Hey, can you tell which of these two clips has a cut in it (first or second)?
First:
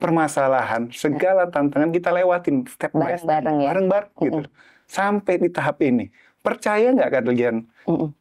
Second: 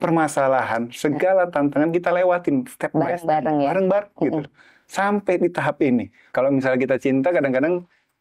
second